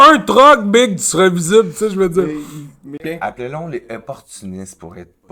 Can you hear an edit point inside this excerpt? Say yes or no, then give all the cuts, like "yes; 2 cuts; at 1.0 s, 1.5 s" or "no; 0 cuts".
yes; 1 cut; at 3.0 s